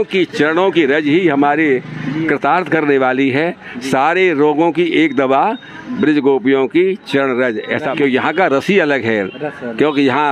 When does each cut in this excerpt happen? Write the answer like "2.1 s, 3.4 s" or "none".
7.8 s